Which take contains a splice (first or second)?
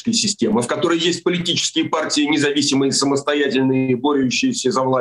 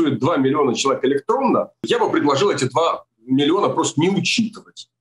second